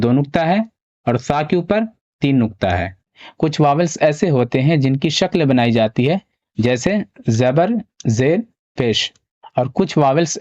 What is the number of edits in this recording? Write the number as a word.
one